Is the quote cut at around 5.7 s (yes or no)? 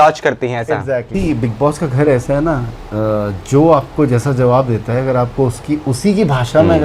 no